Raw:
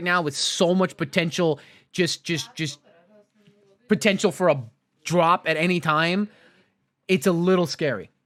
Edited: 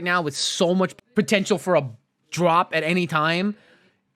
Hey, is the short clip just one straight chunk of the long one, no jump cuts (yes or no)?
no